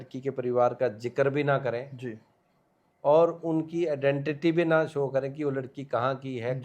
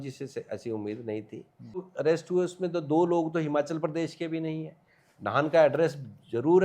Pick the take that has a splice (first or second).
second